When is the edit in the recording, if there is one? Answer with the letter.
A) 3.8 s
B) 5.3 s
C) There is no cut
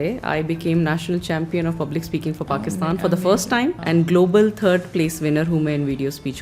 A